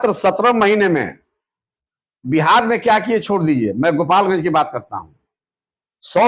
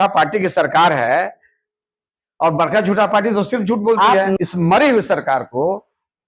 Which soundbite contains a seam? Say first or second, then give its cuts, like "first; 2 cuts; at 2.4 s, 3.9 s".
second; 1 cut; at 4.4 s